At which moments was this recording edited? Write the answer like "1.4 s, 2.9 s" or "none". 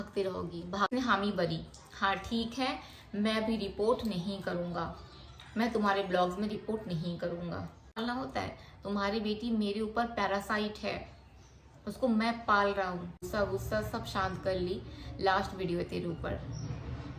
0.9 s, 8.0 s, 13.1 s